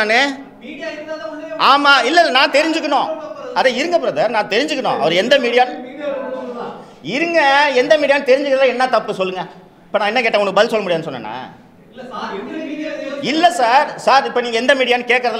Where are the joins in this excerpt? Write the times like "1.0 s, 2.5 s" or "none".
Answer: none